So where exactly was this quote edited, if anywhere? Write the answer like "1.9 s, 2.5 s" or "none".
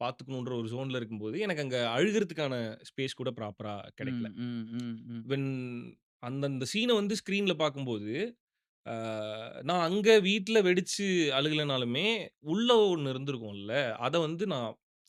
none

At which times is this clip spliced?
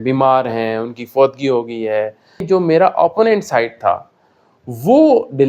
2.4 s

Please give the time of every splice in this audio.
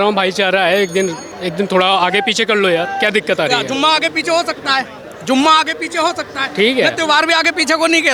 none

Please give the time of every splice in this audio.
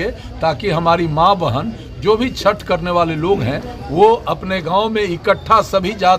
none

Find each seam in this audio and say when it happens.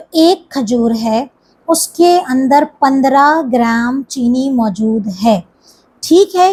none

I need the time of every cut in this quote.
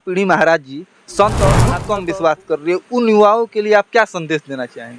1.8 s

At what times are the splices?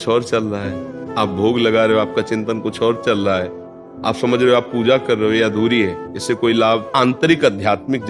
6.1 s, 6.9 s

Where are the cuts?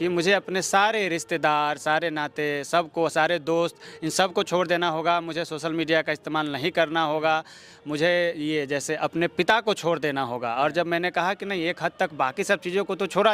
none

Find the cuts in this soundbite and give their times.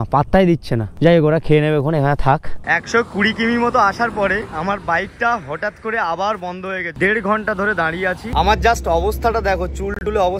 2.6 s, 6.9 s, 8.2 s

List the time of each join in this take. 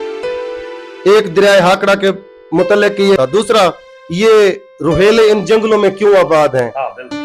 3.2 s

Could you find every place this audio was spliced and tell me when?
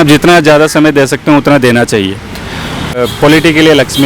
3.0 s

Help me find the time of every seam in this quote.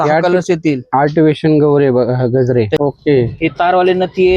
2.7 s

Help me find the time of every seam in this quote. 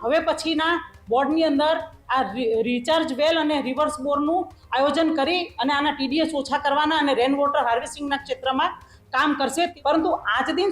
9.7 s

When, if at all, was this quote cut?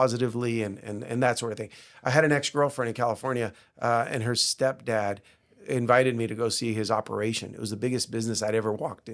none

